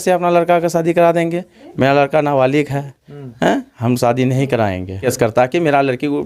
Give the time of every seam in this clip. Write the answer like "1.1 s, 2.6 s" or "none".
5.0 s